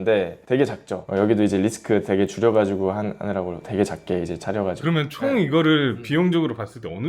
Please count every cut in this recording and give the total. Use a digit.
2